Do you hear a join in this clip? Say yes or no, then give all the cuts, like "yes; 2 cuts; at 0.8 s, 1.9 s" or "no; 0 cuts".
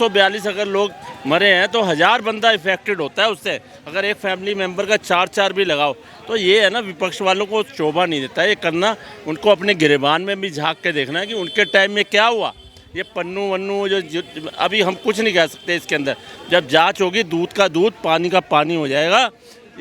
no; 0 cuts